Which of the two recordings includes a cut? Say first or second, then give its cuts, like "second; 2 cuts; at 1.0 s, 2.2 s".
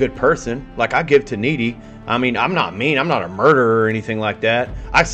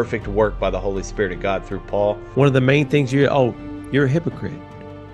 second; 1 cut; at 2.2 s